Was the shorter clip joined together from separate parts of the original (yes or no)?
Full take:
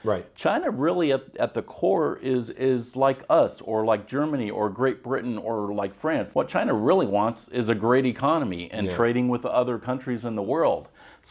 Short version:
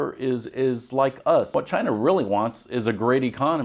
yes